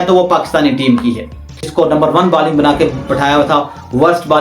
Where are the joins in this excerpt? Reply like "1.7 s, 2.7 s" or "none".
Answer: 1.7 s